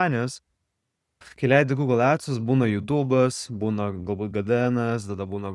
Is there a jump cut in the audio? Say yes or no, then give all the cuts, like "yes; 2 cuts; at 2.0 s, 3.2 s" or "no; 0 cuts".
yes; 1 cut; at 1.2 s